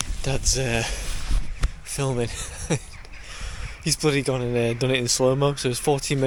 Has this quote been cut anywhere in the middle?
no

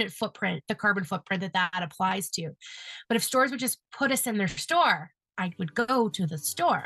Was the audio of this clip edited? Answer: no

